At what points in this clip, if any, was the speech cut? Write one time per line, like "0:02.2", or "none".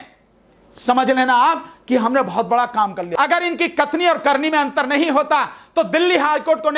0:03.0